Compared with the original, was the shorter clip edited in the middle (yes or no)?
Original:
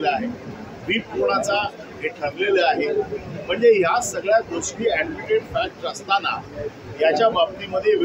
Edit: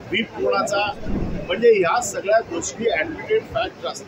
yes